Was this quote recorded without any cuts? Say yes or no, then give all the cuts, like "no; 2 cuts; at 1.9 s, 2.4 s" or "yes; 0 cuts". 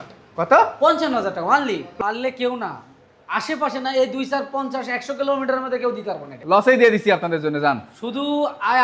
no; 2 cuts; at 1.9 s, 6.3 s